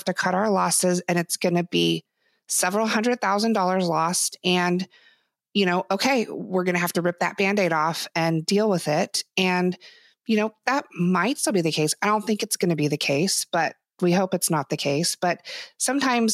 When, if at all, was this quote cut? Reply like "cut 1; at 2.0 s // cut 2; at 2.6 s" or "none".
none